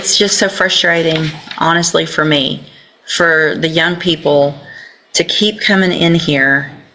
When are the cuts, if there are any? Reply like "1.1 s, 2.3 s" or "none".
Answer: none